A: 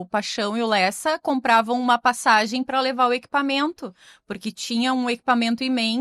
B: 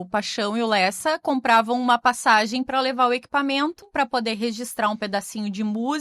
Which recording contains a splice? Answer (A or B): B